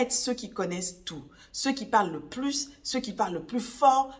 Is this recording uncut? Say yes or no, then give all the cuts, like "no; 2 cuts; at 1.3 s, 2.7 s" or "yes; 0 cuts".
yes; 0 cuts